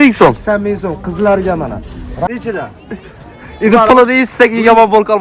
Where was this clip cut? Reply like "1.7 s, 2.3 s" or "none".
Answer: 2.3 s